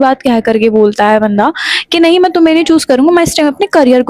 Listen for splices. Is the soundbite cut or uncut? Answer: uncut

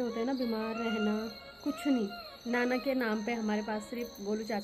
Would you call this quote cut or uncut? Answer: cut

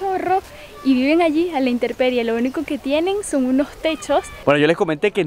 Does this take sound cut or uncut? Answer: cut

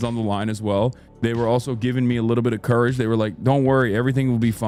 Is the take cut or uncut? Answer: uncut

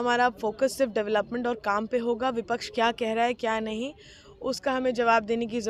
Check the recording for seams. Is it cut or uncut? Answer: uncut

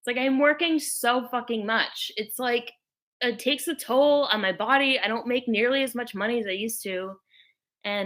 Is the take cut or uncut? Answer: uncut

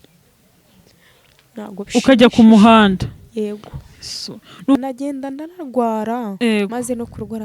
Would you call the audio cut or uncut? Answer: cut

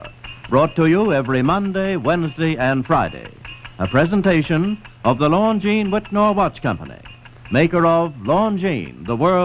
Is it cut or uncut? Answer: uncut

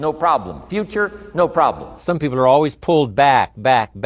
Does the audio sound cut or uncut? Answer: cut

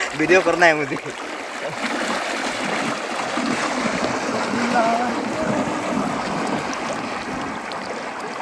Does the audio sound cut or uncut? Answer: uncut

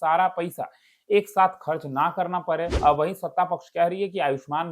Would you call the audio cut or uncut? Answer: cut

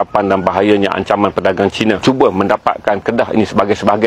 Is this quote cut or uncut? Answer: cut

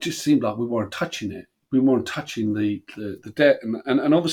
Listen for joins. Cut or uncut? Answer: uncut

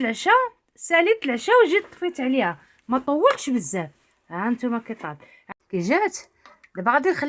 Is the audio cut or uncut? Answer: cut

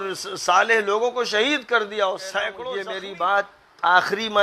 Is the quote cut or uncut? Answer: cut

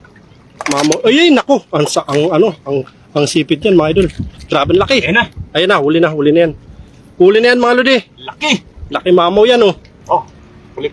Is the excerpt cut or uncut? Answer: cut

